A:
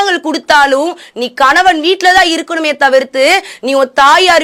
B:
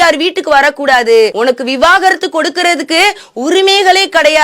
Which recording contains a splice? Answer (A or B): B